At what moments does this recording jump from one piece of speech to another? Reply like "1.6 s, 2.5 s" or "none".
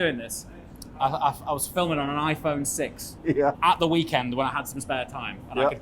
3.5 s